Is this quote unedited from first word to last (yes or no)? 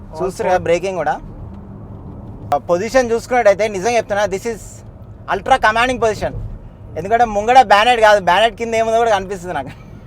no